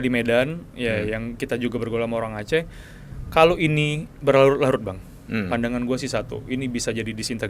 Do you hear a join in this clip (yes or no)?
no